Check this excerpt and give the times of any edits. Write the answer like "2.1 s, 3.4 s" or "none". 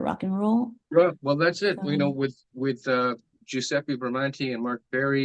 none